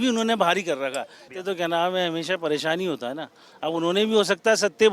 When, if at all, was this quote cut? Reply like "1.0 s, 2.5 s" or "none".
1.2 s